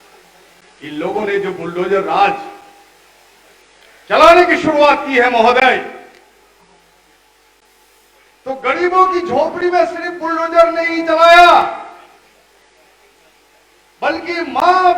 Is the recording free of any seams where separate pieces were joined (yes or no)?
yes